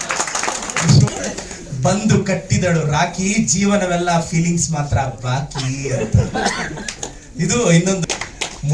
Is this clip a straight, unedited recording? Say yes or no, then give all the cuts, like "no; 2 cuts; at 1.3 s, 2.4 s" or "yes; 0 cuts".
no; 2 cuts; at 1.1 s, 8.0 s